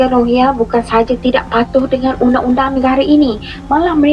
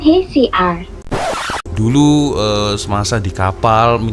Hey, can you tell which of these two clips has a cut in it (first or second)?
second